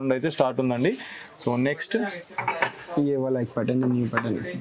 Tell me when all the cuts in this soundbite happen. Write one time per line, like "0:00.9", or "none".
none